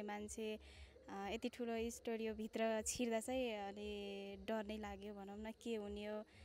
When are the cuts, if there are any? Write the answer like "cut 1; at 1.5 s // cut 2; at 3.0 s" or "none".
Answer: none